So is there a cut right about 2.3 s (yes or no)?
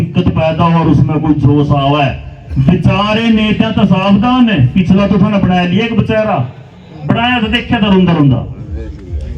no